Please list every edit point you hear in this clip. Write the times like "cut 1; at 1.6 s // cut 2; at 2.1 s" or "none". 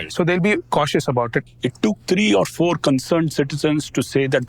cut 1; at 1.4 s